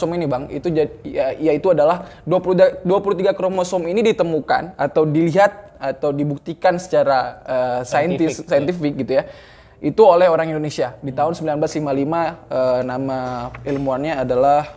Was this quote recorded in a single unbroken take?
yes; 0 cuts

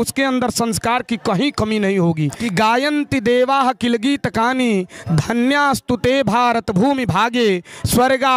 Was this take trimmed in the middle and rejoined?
yes; 1 cut; at 2.4 s

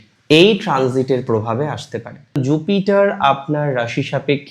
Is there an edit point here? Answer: yes; 1 cut; at 2.4 s

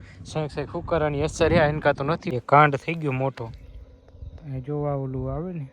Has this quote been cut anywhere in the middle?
yes; 1 cut; at 2.3 s

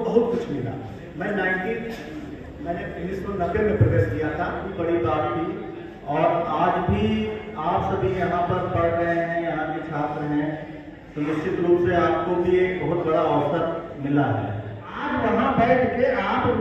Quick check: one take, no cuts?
no; 2 cuts; at 4.7 s, 15.0 s

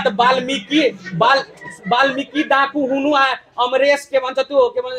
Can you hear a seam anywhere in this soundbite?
no; 0 cuts

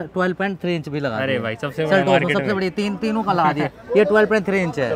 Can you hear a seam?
no; 0 cuts

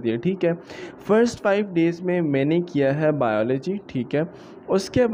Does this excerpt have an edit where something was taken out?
no; 0 cuts

